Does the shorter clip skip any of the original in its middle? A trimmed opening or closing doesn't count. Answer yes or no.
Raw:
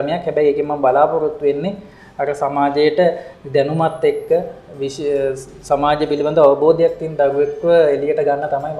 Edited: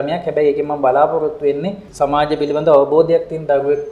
yes